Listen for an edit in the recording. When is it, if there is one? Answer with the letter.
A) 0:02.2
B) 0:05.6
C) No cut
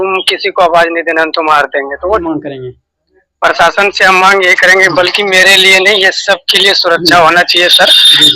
A